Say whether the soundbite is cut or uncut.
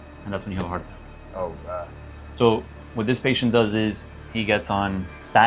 uncut